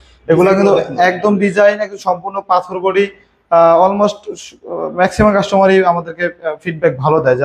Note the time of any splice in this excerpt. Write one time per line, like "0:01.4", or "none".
none